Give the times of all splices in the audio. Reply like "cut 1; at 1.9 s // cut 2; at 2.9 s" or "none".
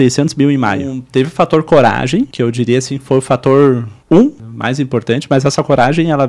cut 1; at 0.9 s // cut 2; at 2.3 s // cut 3; at 3.9 s // cut 4; at 4.5 s